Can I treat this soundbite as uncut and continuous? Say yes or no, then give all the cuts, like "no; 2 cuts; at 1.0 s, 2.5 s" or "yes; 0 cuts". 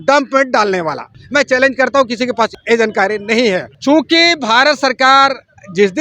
no; 3 cuts; at 1.1 s, 2.5 s, 3.7 s